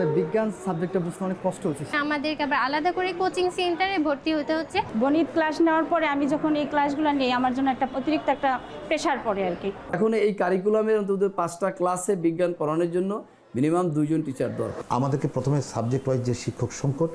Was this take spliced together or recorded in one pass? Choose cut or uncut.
cut